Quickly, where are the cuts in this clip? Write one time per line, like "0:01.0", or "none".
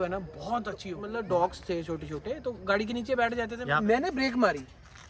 0:01.0
0:03.5